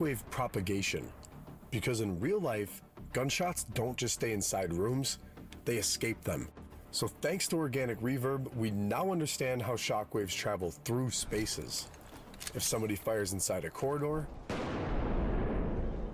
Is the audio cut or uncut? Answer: uncut